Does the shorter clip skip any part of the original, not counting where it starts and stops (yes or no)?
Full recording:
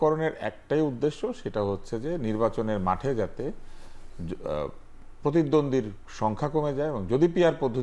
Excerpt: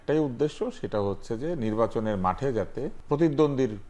yes